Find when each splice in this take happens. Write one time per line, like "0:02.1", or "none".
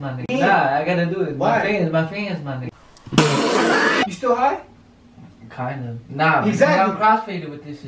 0:04.1